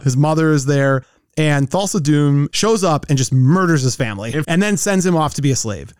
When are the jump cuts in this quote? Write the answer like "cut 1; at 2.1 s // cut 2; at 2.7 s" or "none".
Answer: cut 1; at 2.5 s // cut 2; at 4.4 s